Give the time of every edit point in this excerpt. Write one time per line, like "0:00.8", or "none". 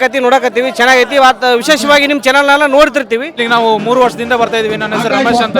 0:03.4